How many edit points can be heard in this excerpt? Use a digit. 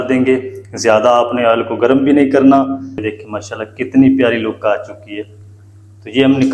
1